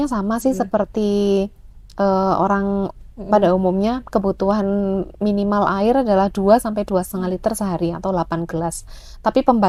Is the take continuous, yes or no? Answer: yes